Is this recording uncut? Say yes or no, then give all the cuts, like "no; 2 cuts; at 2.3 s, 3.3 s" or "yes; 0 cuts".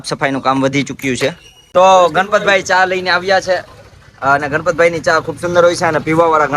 no; 1 cut; at 1.5 s